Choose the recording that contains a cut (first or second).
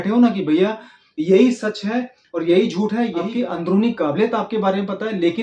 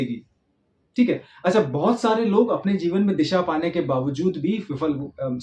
first